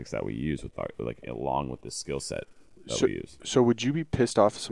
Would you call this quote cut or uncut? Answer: uncut